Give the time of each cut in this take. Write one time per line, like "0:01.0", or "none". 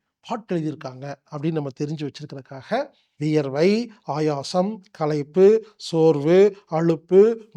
0:03.1